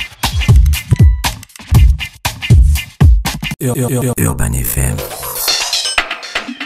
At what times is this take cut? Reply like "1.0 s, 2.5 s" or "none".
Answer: 3.6 s